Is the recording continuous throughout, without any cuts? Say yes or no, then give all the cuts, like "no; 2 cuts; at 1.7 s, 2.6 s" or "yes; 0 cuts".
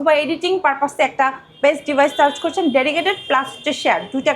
yes; 0 cuts